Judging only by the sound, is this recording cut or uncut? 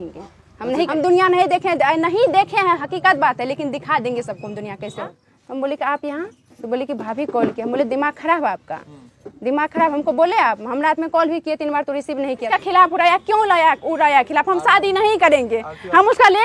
cut